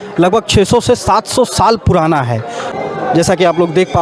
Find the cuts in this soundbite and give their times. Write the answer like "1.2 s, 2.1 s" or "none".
2.7 s